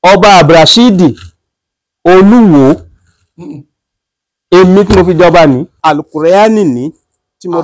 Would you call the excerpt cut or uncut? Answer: cut